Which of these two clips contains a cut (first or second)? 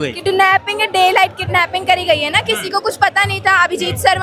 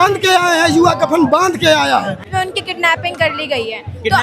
second